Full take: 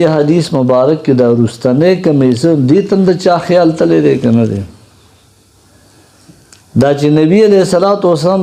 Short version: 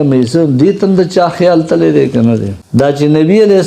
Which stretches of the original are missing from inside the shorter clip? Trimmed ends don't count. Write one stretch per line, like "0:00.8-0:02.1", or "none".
0:04.7-0:06.6